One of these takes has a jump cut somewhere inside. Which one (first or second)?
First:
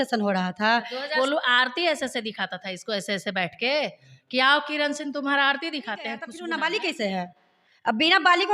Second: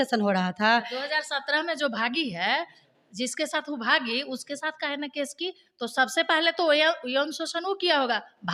first